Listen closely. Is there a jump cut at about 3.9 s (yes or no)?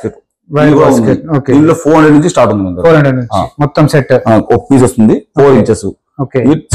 no